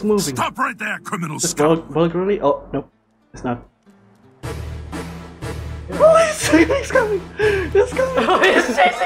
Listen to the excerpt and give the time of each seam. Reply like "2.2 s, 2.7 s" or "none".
none